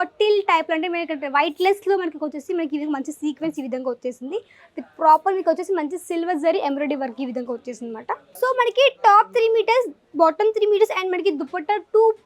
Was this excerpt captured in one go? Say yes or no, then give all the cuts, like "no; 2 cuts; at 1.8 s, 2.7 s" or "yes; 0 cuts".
no; 1 cut; at 8.3 s